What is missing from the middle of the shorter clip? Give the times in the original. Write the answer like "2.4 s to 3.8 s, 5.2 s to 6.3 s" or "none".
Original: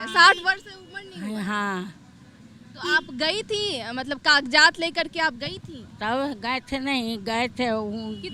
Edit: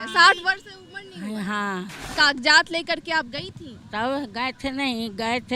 2.1 s to 4.2 s